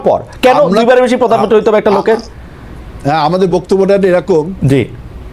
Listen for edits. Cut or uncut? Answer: uncut